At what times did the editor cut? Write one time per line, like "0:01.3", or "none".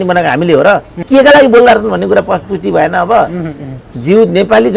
0:01.0